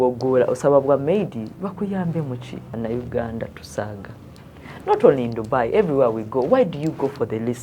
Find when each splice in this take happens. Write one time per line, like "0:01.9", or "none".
0:02.7